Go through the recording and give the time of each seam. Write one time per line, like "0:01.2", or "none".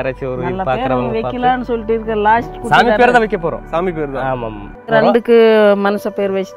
0:04.9